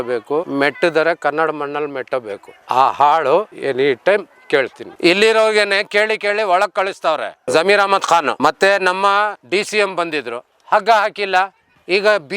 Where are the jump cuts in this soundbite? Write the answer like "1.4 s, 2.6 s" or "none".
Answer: 4.8 s